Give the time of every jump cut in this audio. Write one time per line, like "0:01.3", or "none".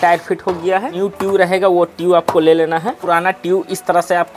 0:00.9
0:02.9